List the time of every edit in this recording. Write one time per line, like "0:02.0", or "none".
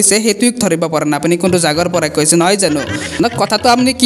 0:03.0